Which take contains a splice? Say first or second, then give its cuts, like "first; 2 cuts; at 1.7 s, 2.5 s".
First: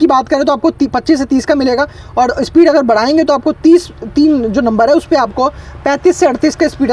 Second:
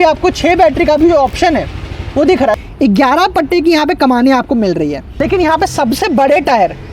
second; 2 cuts; at 2.6 s, 5.1 s